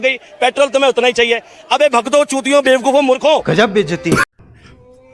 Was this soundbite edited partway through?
no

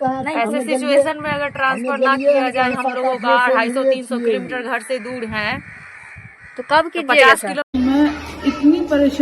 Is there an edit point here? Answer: no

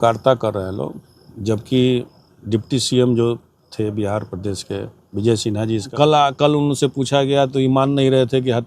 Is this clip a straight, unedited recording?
no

